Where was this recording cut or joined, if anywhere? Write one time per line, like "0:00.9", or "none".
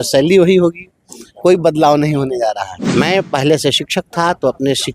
0:02.7